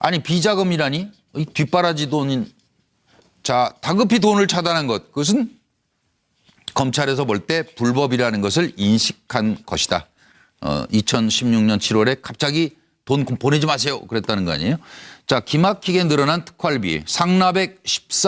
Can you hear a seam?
yes; 1 cut; at 11.0 s

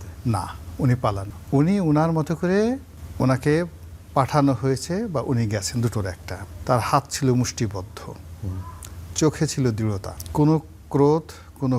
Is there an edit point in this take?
yes; 4 cuts; at 1.3 s, 3.0 s, 6.3 s, 10.1 s

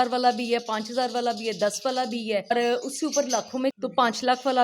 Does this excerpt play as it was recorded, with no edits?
no; 2 cuts; at 2.5 s, 3.8 s

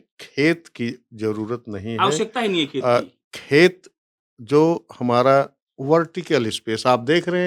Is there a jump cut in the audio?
no; 0 cuts

